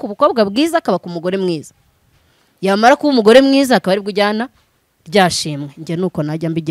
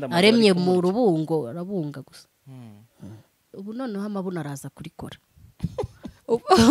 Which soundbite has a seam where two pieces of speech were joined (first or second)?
second